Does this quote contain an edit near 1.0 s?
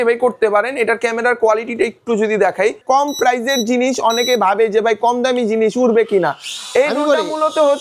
no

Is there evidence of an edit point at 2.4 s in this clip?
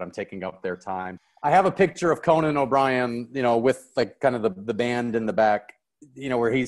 no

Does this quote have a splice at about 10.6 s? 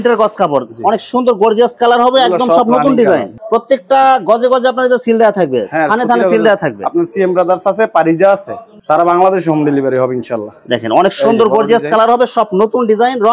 no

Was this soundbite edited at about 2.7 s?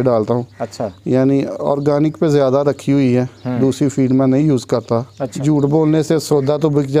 no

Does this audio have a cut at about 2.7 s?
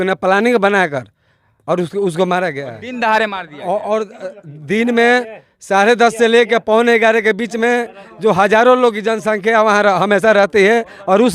yes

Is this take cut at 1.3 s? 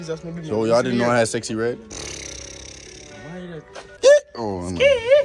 no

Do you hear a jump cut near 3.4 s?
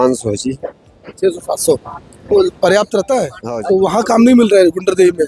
yes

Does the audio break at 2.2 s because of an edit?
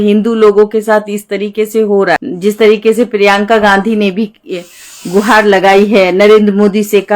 yes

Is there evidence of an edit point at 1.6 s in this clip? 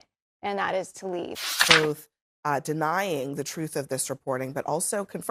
yes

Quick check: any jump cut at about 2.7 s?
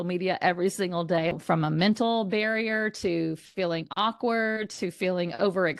no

